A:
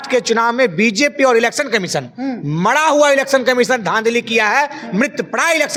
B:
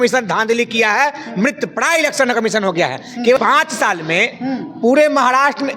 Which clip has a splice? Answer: B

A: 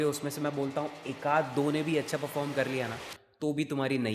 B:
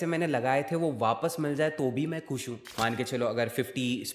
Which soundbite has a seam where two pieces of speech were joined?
B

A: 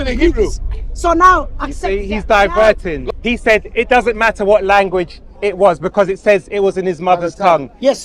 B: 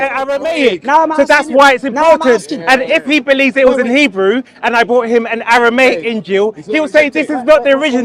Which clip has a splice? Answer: A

